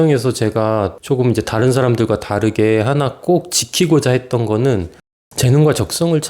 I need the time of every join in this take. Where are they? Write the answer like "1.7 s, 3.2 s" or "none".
1.0 s, 5.2 s